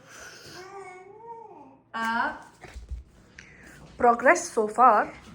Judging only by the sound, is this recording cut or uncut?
cut